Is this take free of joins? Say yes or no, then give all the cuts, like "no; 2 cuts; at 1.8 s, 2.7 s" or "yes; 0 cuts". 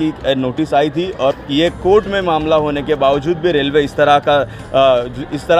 no; 1 cut; at 1.4 s